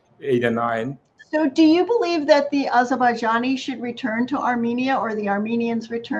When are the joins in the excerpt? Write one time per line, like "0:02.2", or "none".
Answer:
0:01.2